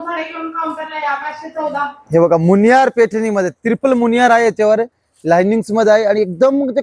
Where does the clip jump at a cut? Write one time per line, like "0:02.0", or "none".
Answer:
none